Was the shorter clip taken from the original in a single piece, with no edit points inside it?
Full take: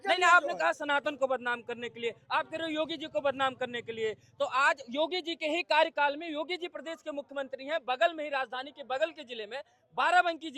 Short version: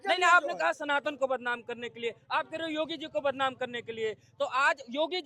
yes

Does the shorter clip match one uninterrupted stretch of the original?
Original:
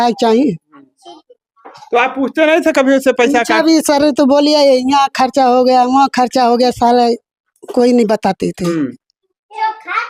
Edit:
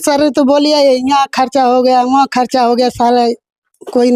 yes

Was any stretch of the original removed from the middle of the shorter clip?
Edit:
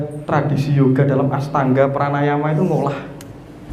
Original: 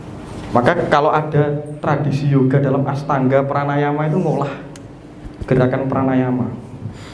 no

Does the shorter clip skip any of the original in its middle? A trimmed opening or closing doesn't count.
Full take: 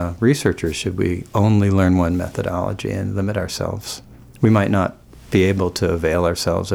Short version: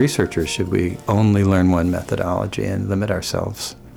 no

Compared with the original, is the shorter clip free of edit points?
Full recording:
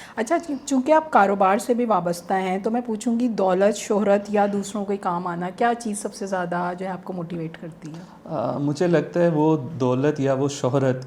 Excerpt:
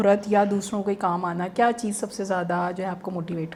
yes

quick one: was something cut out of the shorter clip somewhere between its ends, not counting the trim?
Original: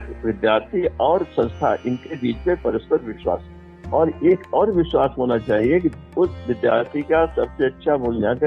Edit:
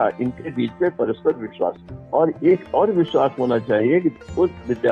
yes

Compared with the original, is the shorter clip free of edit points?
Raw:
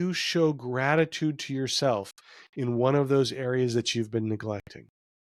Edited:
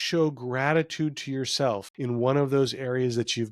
no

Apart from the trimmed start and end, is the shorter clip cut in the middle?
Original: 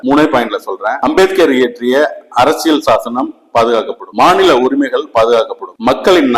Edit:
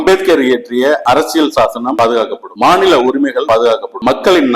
yes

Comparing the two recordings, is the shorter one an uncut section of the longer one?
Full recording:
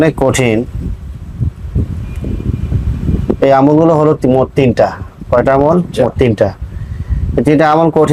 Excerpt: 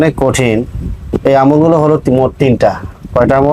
no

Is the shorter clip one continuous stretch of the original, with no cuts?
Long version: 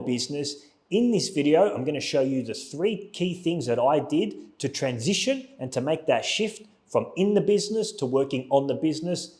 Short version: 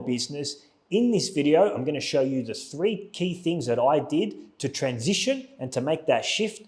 yes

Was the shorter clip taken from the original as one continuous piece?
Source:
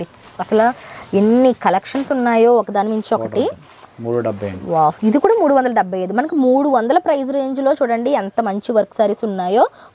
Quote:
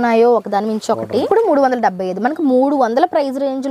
no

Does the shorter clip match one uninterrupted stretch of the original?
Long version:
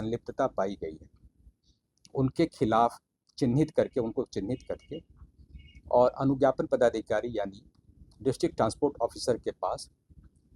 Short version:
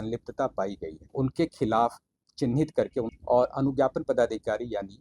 no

